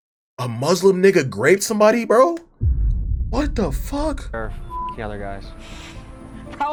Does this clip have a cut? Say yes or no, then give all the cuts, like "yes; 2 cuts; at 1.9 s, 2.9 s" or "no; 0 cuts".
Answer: no; 0 cuts